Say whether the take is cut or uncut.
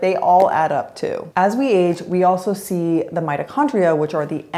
cut